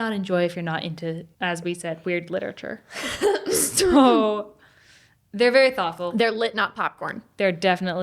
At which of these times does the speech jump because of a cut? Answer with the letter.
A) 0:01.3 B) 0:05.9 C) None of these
A